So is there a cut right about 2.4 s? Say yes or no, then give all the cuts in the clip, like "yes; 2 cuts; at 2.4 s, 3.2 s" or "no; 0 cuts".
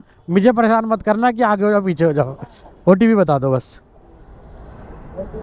no; 0 cuts